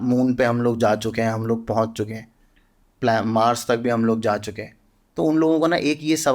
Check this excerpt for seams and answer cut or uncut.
uncut